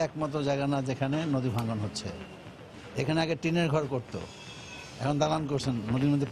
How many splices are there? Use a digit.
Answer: 1